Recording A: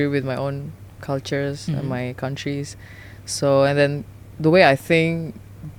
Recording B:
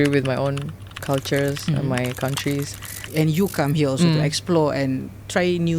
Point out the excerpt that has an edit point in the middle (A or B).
B